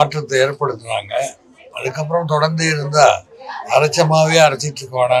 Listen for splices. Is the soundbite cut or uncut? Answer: uncut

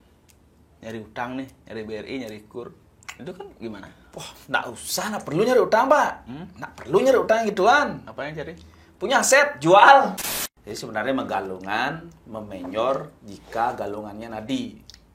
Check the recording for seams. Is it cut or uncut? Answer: cut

